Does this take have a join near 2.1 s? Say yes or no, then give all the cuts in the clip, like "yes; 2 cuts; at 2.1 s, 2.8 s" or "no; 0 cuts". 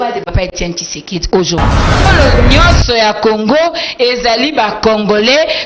yes; 1 cut; at 2.1 s